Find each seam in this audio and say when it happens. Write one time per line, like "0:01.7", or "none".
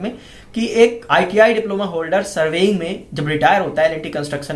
0:01.0